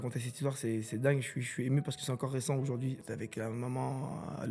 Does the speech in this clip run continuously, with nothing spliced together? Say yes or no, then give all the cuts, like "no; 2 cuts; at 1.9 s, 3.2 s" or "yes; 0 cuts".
no; 1 cut; at 3.0 s